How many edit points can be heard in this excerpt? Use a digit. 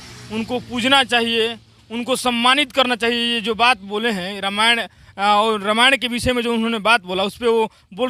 0